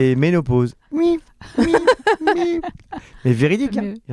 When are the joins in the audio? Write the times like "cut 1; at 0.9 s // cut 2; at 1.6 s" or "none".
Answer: none

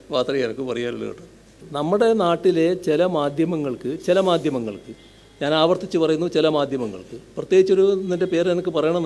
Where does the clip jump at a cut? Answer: cut 1; at 1.6 s

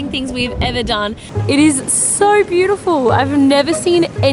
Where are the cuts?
cut 1; at 1.2 s

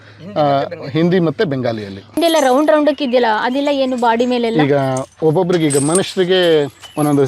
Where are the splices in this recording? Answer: cut 1; at 2.2 s

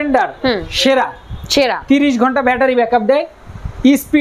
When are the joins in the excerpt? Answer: none

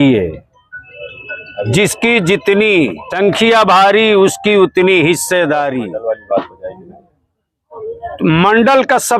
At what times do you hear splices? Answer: cut 1; at 3.0 s // cut 2; at 5.9 s

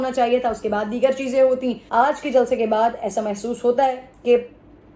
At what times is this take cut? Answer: cut 1; at 1.8 s

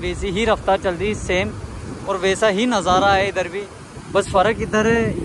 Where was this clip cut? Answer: none

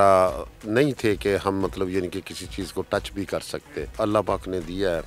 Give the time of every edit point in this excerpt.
cut 1; at 3.9 s

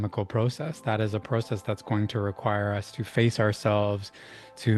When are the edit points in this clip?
none

